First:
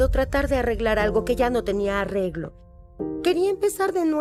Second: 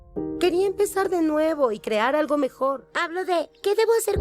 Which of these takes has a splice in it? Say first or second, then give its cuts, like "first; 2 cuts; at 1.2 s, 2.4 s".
second; 1 cut; at 2.9 s